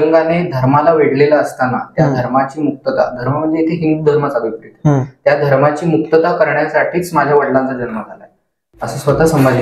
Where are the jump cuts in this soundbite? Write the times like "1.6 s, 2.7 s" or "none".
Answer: none